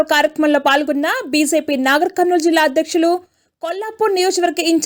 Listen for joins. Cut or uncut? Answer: uncut